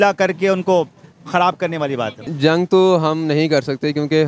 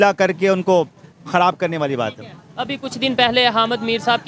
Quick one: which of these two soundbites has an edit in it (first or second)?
first